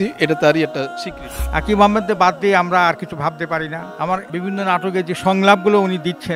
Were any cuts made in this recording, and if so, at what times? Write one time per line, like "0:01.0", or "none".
0:01.0
0:03.8